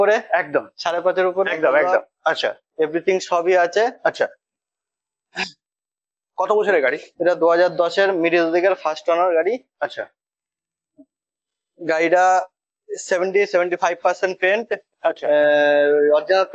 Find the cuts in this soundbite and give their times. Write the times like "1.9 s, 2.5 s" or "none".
2.1 s